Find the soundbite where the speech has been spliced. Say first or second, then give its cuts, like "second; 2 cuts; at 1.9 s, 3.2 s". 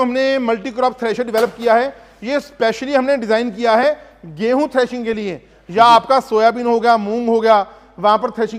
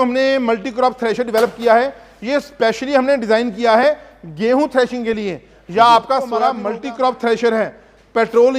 second; 1 cut; at 6.6 s